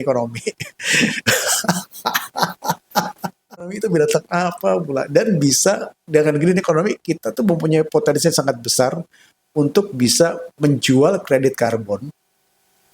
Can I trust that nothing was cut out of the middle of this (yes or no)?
no